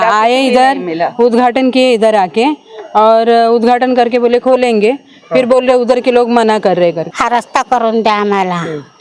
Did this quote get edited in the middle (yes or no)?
yes